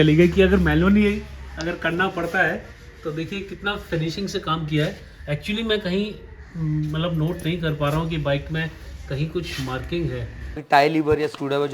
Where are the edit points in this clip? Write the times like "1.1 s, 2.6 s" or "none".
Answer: 10.6 s